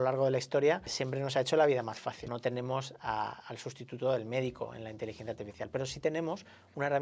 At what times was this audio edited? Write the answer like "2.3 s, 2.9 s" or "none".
1.0 s, 2.2 s

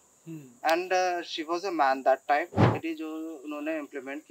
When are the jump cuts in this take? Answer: 2.8 s

